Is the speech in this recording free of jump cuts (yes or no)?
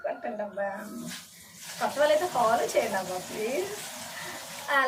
yes